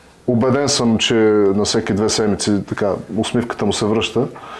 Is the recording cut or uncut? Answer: uncut